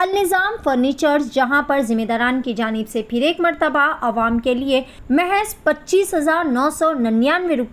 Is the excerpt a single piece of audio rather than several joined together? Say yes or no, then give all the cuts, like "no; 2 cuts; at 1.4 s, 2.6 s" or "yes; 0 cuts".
no; 1 cut; at 4.9 s